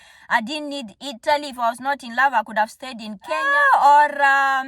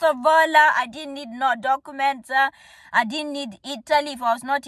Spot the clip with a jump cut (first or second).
first